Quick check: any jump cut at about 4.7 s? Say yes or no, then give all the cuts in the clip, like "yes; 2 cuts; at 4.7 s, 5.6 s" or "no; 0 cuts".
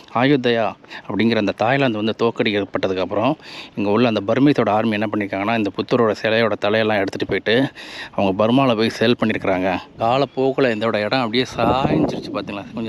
no; 1 cut; at 9.9 s